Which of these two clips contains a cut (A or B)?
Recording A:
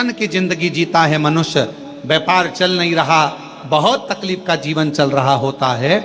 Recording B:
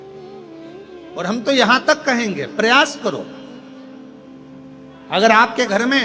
B